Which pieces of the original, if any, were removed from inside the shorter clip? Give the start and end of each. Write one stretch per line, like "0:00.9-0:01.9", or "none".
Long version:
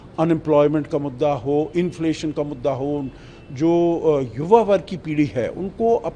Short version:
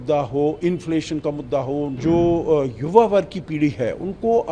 0:03.1-0:03.5